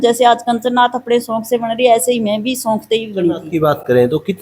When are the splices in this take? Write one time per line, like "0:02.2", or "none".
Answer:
0:03.4